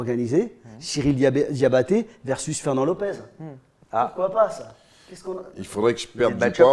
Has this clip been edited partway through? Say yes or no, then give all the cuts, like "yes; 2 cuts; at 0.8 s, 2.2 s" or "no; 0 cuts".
no; 0 cuts